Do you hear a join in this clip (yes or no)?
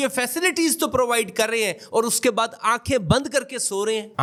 no